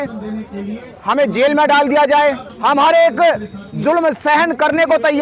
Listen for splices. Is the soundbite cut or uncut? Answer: cut